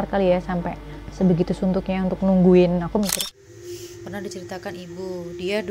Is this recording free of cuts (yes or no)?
no